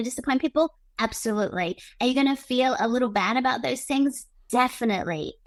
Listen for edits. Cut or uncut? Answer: uncut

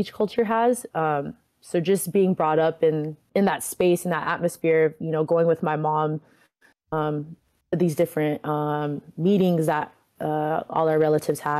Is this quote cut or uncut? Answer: cut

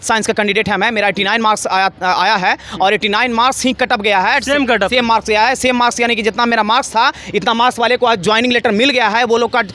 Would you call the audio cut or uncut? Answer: uncut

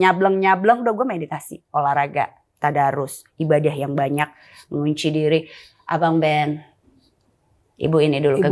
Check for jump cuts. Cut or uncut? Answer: uncut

